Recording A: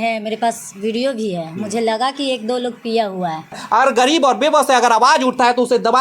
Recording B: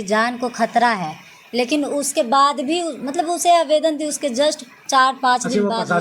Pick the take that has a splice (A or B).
A